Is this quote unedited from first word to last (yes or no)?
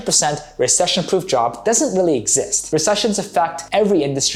yes